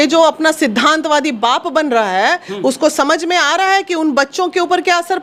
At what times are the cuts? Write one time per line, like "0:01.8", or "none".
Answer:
none